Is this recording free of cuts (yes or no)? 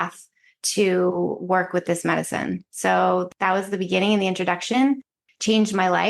no